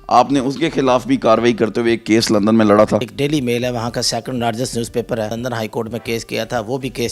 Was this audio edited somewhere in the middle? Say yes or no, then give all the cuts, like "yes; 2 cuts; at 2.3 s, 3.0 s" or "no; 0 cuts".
yes; 2 cuts; at 3.1 s, 5.3 s